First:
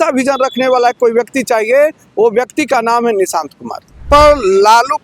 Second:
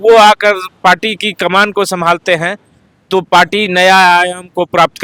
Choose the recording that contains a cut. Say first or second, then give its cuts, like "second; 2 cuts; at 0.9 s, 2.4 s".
first; 1 cut; at 4.1 s